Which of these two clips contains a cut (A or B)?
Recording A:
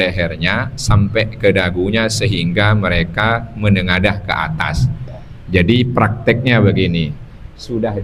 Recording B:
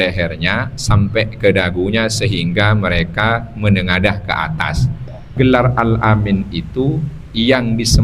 B